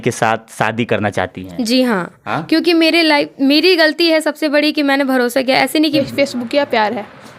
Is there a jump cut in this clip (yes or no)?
yes